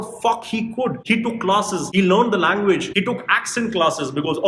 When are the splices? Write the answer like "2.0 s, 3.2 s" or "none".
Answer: 1.0 s